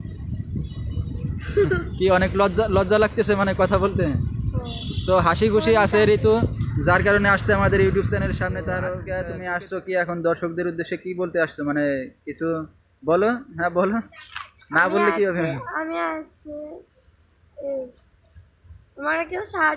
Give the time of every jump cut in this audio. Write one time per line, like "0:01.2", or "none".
0:09.1